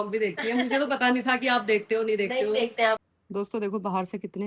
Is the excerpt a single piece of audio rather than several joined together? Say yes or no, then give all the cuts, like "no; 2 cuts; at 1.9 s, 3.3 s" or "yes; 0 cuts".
no; 1 cut; at 3.0 s